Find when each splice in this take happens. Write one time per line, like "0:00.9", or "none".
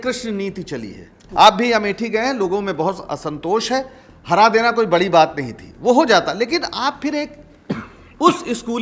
0:01.1